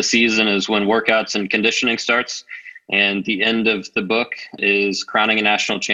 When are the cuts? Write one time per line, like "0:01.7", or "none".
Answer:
0:04.6